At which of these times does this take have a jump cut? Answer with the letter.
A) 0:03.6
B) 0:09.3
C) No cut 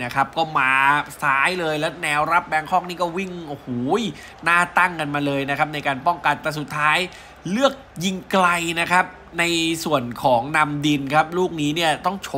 C